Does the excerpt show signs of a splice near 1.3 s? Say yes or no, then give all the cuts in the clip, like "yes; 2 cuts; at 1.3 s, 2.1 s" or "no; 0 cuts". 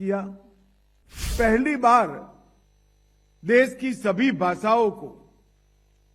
yes; 1 cut; at 1.3 s